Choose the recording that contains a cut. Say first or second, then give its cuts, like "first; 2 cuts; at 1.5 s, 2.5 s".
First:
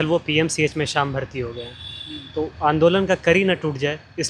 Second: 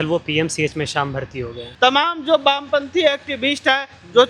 second; 1 cut; at 1.6 s